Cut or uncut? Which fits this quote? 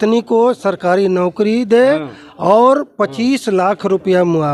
uncut